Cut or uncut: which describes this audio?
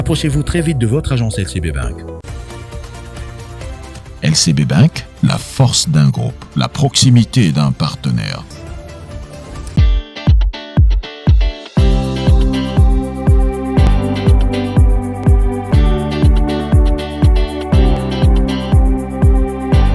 cut